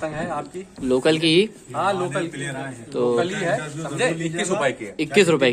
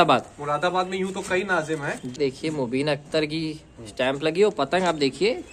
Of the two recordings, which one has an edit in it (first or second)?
second